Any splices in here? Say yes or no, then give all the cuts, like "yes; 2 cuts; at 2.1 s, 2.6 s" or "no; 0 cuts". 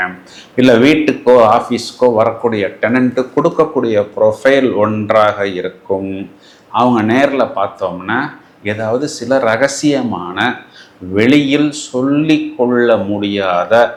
no; 0 cuts